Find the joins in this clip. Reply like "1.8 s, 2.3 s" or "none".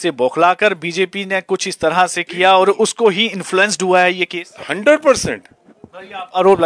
none